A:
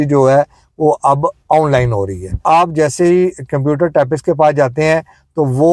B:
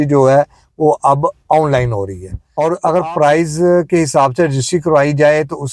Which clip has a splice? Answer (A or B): B